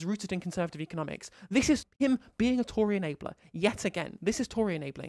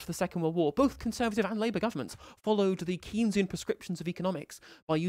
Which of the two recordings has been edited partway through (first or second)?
first